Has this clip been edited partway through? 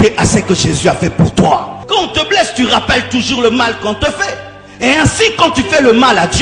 yes; 1 cut; at 1.8 s

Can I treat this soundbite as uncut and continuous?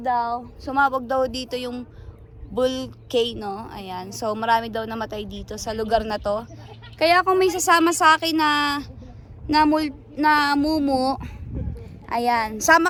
yes; 0 cuts

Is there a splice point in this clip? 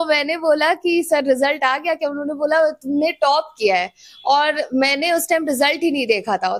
no; 0 cuts

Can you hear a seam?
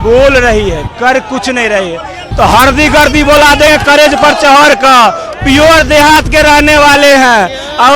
yes; 1 cut; at 2.2 s

